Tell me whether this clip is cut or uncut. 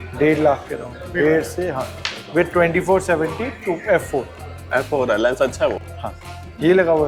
uncut